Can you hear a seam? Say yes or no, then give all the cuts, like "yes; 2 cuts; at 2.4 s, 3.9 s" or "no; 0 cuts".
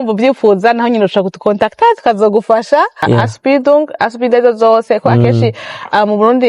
yes; 1 cut; at 3.0 s